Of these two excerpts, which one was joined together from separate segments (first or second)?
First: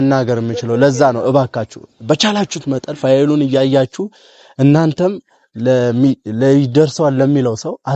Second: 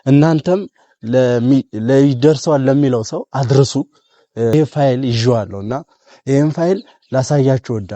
second